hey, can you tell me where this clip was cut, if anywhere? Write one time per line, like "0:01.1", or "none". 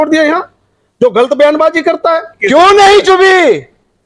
0:02.4